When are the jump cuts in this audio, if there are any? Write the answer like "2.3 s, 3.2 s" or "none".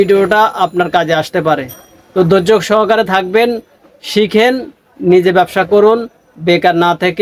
none